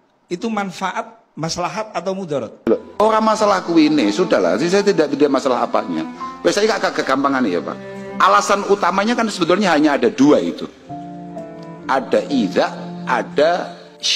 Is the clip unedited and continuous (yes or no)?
no